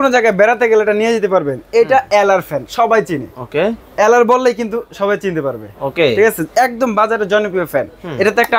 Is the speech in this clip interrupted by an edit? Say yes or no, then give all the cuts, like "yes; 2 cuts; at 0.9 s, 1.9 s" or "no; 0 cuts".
no; 0 cuts